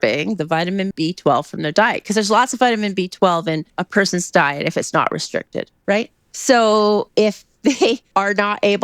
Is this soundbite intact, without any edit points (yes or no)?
no